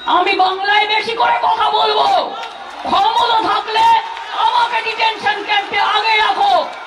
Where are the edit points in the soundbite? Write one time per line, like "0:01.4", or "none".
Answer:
none